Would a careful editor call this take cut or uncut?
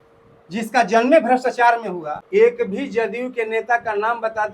cut